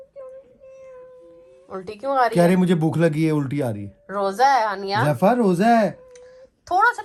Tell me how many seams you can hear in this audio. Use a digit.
0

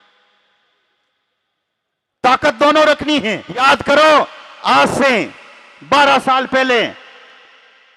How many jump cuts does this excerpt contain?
1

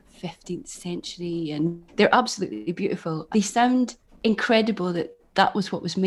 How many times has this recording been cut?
3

